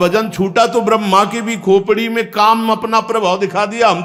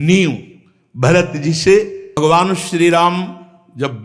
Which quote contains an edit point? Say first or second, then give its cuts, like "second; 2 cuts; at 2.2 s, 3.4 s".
second; 1 cut; at 2.0 s